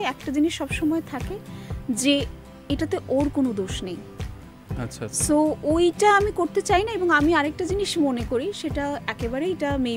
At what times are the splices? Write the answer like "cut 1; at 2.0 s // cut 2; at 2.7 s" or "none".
none